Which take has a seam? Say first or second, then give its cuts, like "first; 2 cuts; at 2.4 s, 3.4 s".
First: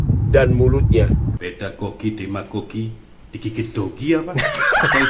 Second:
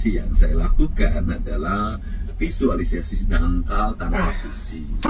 first; 1 cut; at 1.3 s